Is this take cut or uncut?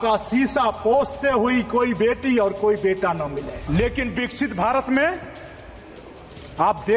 cut